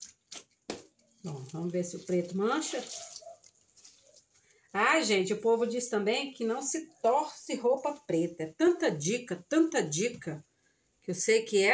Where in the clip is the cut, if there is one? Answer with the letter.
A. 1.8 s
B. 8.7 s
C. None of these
C